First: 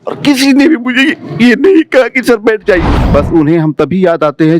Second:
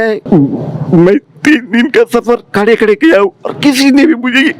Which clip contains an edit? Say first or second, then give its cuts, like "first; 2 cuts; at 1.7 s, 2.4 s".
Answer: first; 1 cut; at 3.0 s